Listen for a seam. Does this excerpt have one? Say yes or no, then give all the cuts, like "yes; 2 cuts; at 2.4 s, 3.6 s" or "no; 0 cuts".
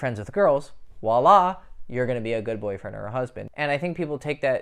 yes; 1 cut; at 3.4 s